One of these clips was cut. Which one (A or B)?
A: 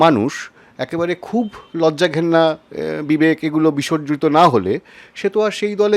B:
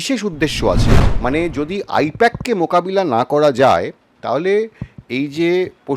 B